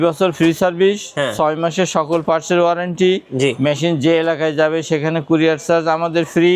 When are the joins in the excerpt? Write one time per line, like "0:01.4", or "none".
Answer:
none